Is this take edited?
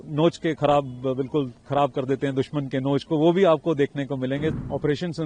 yes; 1 cut; at 4.3 s

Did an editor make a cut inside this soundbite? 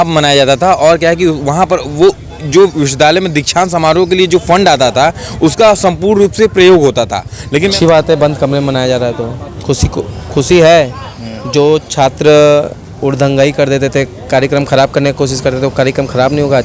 yes; 1 cut; at 7.7 s

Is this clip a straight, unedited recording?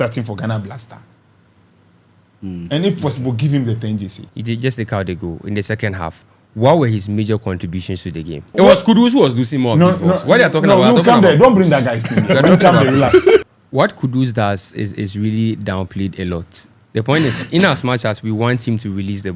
no; 3 cuts; at 4.2 s, 8.5 s, 13.4 s

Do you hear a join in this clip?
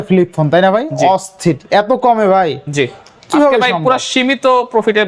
no; 0 cuts

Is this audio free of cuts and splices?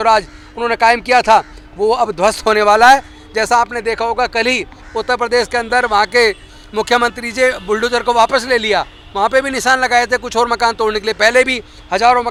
yes; 0 cuts

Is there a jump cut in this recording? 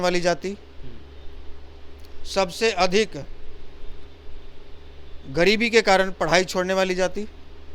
no; 0 cuts

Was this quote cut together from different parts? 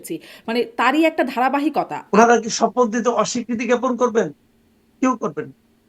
yes; 1 cut; at 2.0 s

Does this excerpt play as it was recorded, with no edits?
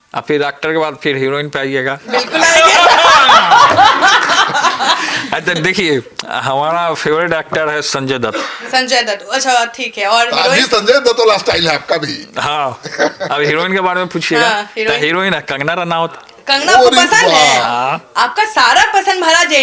yes; 0 cuts

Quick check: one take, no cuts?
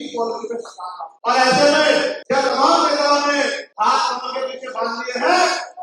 no; 3 cuts; at 1.0 s, 2.2 s, 3.6 s

